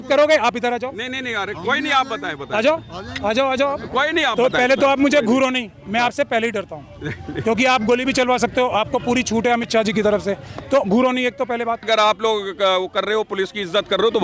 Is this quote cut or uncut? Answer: cut